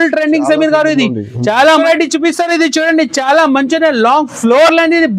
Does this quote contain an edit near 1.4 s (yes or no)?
yes